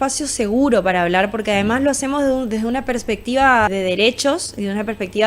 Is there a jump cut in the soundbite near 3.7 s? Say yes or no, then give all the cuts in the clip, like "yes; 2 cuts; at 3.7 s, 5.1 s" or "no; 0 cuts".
yes; 1 cut; at 3.7 s